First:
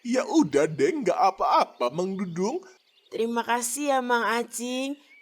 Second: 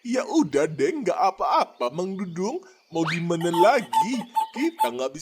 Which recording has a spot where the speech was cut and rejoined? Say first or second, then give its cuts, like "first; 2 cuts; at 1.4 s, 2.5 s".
first; 1 cut; at 2.7 s